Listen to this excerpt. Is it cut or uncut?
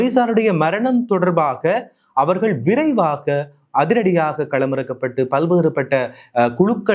uncut